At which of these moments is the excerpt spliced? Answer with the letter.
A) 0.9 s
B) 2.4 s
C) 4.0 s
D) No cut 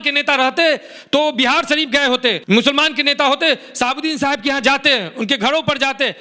B